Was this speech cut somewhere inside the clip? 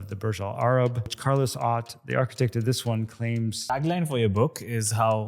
yes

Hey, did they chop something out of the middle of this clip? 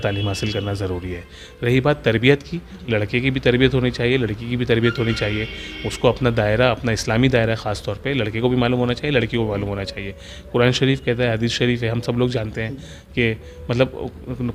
no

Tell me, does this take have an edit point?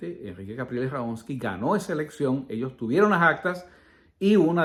no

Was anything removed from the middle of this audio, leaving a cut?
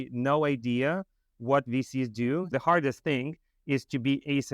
yes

